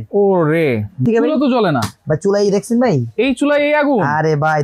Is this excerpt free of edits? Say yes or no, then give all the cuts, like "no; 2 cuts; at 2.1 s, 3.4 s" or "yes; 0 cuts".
no; 1 cut; at 1.1 s